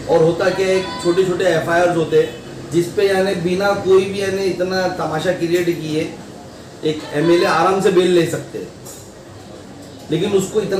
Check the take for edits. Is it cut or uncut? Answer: uncut